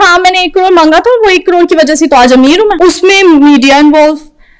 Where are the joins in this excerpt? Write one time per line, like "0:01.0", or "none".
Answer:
0:02.8